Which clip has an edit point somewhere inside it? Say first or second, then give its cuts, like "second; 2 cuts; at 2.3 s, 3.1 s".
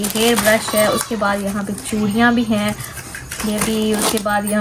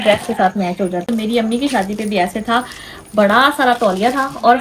second; 1 cut; at 1.1 s